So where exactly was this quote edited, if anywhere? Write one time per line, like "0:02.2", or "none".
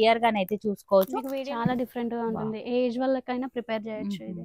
0:01.2